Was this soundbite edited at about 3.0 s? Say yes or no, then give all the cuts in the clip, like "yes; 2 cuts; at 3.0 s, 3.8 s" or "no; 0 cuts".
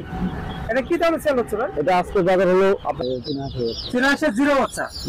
yes; 1 cut; at 3.0 s